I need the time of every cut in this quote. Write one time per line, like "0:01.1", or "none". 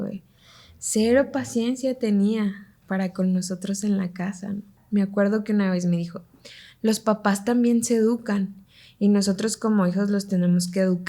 0:04.8